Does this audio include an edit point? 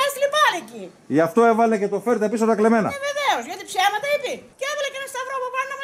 yes; 1 cut; at 4.5 s

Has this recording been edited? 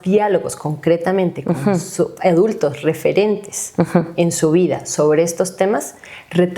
no; 0 cuts

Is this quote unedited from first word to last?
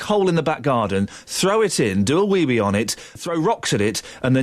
no; 1 cut; at 3.2 s

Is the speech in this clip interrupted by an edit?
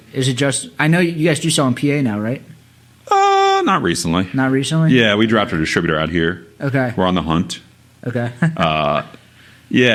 no; 0 cuts

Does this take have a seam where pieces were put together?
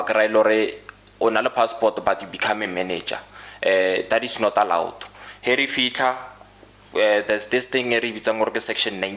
no; 0 cuts

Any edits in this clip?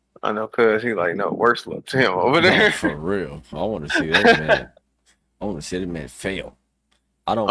no; 0 cuts

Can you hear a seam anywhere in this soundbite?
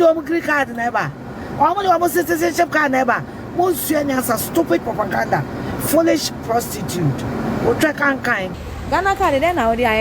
yes; 1 cut; at 8.6 s

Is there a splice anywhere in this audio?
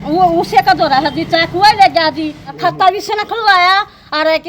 yes; 1 cut; at 2.4 s

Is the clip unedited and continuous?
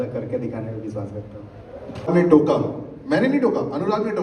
no; 1 cut; at 2.1 s

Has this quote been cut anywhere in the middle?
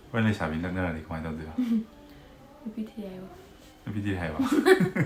no; 0 cuts

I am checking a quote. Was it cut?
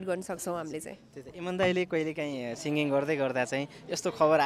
no; 0 cuts

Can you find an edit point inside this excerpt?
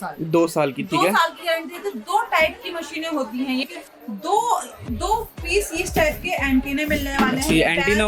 yes; 1 cut; at 3.6 s

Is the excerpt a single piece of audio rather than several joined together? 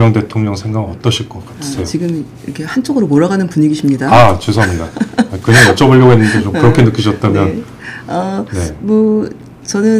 yes; 0 cuts

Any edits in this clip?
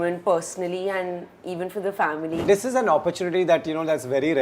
yes; 1 cut; at 2.4 s

